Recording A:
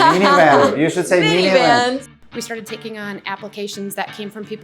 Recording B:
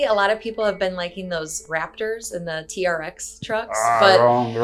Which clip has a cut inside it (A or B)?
A